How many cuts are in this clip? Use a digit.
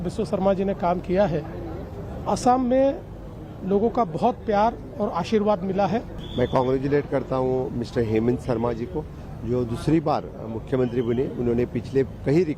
1